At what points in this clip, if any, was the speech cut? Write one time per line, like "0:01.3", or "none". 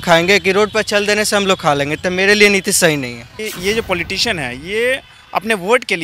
0:03.2